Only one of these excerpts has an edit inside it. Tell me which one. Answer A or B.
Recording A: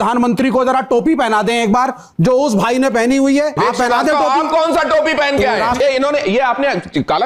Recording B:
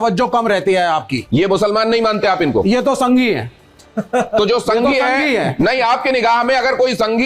A